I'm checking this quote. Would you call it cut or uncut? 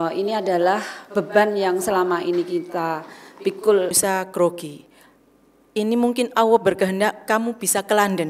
cut